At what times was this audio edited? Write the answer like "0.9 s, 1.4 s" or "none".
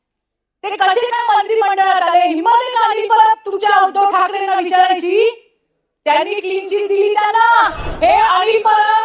7.8 s

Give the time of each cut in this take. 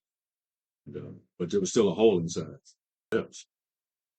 3.1 s

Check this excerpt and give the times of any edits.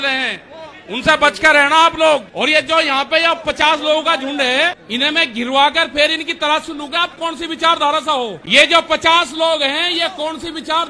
2.3 s, 4.8 s, 8.4 s

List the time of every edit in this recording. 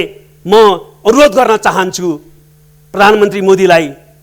none

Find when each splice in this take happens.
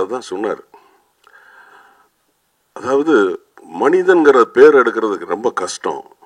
none

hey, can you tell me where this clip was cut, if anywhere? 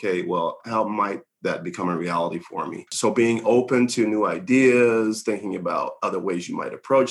2.9 s

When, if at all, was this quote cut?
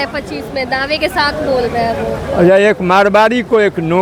none

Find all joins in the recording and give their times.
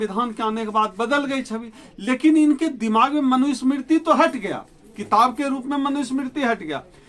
none

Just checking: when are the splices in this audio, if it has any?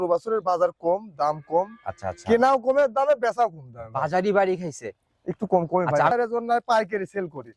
6.1 s

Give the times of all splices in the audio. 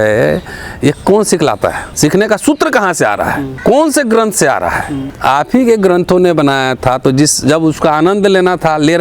1.8 s, 3.5 s, 5.0 s

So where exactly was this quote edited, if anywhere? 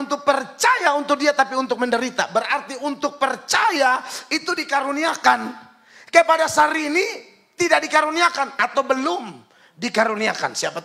none

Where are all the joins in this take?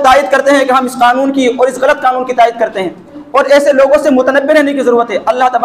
3.2 s

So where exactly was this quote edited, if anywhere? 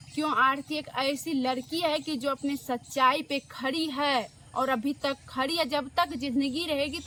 none

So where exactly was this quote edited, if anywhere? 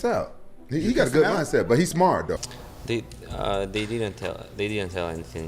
2.4 s

